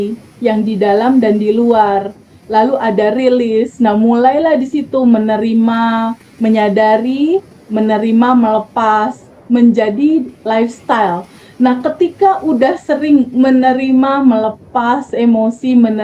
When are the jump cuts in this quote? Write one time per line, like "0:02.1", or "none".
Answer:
none